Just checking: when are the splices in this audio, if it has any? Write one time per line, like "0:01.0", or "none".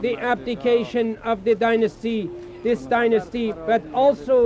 none